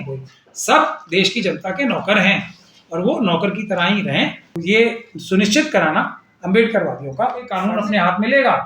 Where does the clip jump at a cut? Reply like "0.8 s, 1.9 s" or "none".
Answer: 4.5 s, 7.6 s